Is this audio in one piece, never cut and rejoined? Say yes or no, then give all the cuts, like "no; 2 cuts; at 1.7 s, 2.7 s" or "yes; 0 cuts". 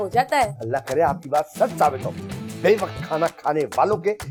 yes; 0 cuts